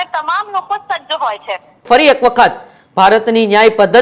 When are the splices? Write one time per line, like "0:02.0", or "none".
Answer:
0:01.8